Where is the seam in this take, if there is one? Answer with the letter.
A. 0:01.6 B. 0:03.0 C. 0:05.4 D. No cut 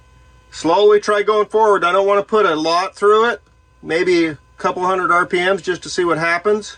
D